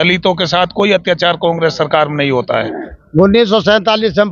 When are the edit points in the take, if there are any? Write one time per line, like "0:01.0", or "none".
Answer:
0:03.0